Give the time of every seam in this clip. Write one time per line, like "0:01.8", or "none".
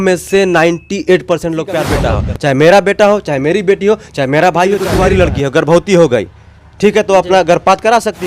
0:02.0
0:04.9